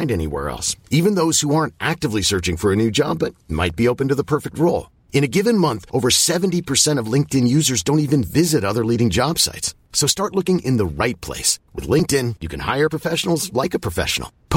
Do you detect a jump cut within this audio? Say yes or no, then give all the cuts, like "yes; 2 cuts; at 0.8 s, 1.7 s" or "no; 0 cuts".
no; 0 cuts